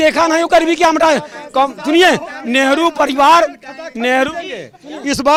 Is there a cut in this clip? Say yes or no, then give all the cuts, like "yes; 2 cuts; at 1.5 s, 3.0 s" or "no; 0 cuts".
no; 0 cuts